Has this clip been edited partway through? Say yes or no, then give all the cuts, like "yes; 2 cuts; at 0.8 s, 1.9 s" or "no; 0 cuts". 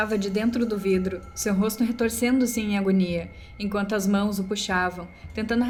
no; 0 cuts